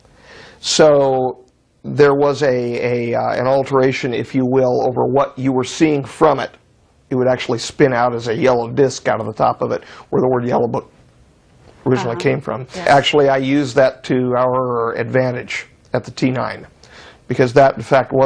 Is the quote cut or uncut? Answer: cut